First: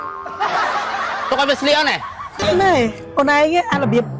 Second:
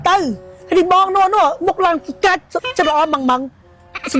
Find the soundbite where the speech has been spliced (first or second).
first